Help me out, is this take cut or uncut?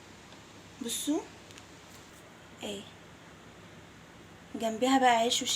cut